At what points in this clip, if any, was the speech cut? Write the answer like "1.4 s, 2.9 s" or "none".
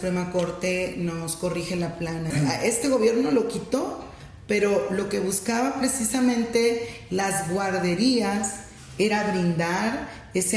2.3 s